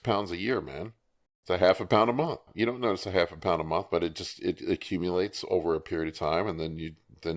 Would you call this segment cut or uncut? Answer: cut